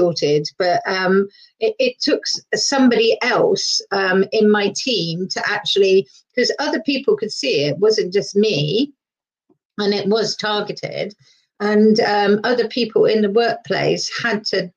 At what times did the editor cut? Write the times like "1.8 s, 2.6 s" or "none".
none